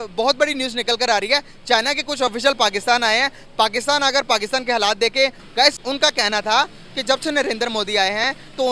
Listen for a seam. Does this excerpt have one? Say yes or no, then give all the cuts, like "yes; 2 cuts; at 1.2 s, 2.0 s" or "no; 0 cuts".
yes; 1 cut; at 5.4 s